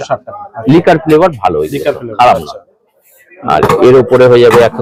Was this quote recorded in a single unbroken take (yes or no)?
yes